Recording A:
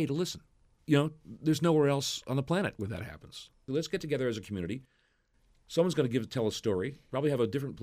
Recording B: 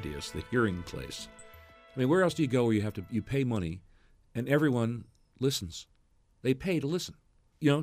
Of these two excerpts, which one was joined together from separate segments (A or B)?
A